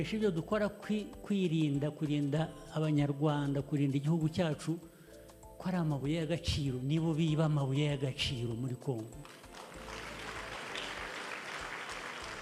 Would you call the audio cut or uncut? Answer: uncut